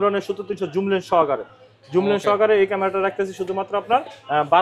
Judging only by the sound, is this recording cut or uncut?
uncut